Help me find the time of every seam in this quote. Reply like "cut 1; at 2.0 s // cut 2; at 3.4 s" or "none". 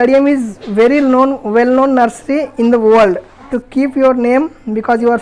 cut 1; at 3.5 s